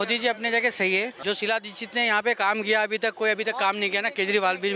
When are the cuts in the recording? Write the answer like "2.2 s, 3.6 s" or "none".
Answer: 1.2 s